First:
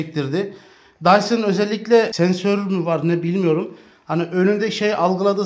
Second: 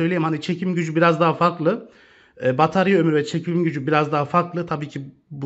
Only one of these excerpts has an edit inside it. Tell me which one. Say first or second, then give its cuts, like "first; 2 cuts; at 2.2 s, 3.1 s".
first; 1 cut; at 2.1 s